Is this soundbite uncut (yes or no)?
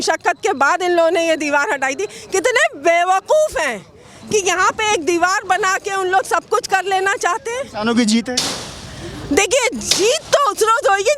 no